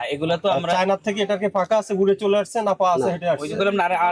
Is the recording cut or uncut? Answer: uncut